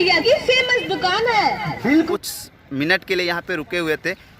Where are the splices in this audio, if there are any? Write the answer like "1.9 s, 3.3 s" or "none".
2.1 s

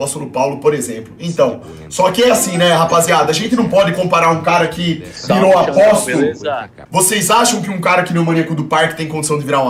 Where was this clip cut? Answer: 6.7 s

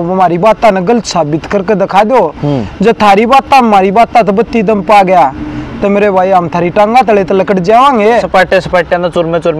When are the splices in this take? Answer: 8.3 s

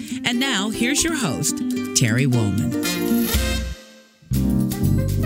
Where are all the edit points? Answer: none

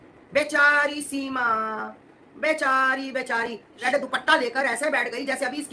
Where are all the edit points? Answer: 3.8 s

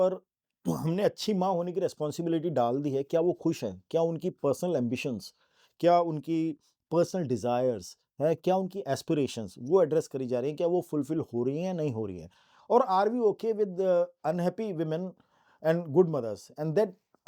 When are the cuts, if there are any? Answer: none

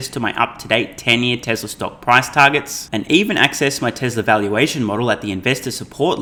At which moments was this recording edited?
none

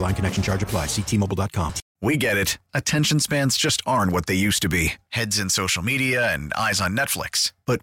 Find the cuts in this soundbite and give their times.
1.8 s

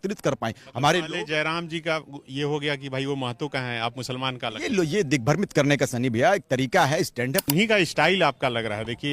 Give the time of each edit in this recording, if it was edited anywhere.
7.4 s

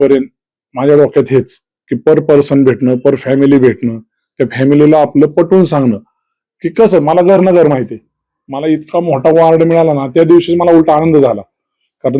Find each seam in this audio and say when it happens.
none

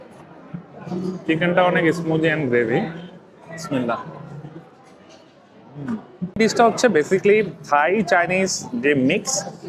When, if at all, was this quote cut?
6.4 s

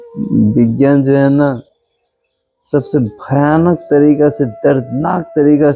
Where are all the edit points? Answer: none

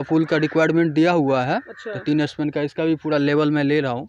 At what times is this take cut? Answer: none

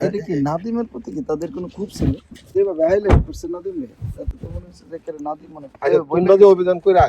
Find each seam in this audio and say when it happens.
2.5 s

